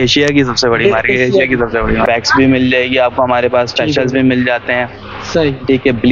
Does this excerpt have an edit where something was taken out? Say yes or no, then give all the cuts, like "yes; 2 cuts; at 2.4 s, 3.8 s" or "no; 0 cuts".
yes; 1 cut; at 2.0 s